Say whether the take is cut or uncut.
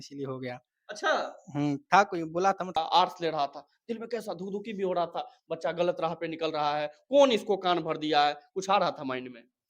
cut